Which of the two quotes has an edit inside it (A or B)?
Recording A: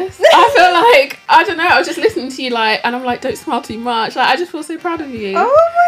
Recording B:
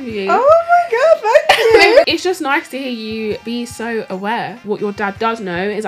B